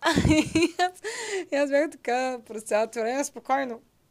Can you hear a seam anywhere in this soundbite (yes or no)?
no